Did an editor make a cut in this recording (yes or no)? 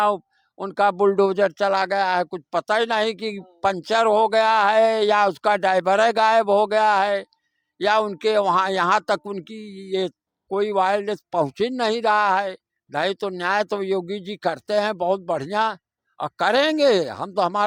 no